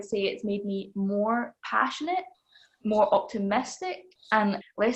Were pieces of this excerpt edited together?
no; 0 cuts

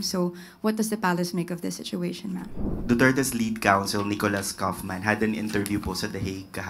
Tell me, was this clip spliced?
yes; 1 cut; at 2.7 s

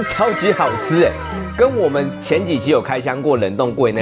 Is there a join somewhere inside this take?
no; 0 cuts

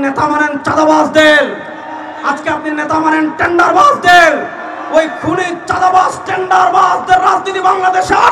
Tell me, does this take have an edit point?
no; 0 cuts

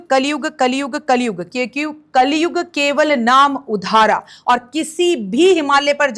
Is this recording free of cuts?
no; 1 cut; at 4.3 s

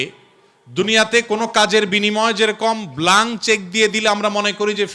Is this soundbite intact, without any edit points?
yes; 0 cuts

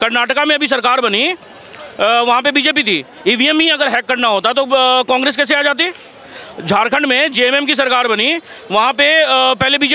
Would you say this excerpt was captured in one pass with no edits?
yes; 0 cuts

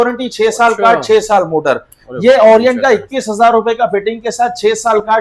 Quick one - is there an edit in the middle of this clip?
no; 0 cuts

